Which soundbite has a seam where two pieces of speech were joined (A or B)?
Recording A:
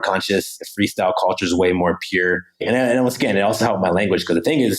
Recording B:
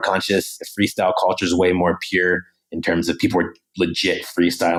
A